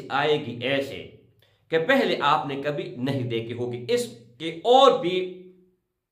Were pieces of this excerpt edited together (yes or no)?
no